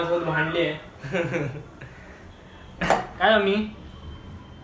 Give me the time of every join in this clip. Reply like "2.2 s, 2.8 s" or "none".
3.1 s